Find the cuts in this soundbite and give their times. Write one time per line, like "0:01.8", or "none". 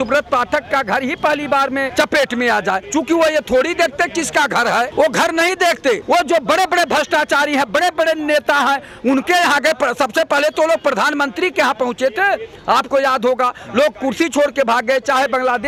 none